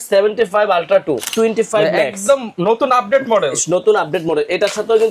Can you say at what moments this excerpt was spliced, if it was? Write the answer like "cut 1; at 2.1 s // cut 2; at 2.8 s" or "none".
cut 1; at 1.3 s